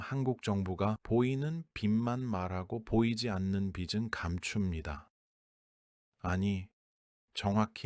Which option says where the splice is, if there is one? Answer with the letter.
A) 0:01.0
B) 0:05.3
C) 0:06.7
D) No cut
A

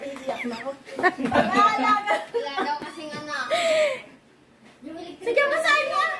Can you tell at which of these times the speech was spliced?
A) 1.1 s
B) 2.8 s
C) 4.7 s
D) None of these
A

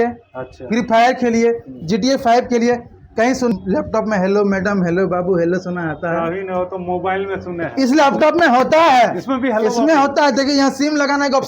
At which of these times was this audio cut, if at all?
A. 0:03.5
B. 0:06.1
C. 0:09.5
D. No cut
A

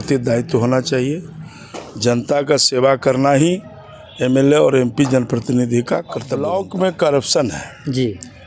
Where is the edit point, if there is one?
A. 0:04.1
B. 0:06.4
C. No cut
B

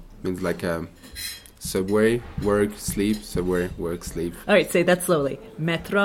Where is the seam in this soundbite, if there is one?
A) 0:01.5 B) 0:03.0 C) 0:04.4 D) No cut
D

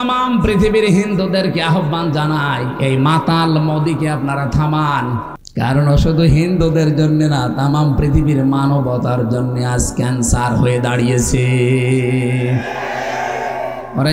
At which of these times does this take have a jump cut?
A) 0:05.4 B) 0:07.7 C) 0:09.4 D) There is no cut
A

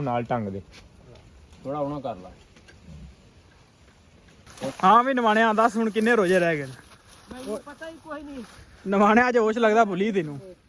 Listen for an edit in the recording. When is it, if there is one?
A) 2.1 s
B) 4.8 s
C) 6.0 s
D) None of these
B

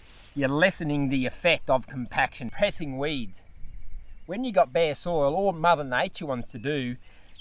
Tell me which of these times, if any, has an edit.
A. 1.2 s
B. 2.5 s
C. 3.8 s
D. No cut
B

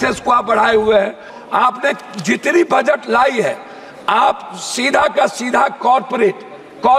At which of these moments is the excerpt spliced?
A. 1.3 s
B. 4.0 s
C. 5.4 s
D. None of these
A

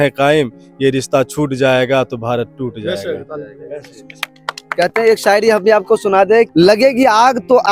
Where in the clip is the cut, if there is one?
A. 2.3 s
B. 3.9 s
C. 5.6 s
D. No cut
D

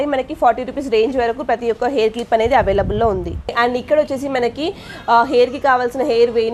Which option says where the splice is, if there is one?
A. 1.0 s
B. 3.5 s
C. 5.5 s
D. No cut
D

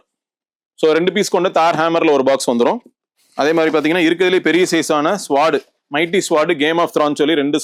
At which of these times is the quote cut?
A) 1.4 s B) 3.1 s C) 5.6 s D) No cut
D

